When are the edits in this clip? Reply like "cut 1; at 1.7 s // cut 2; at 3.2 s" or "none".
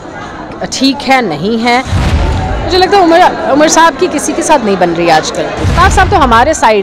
cut 1; at 2.0 s // cut 2; at 5.6 s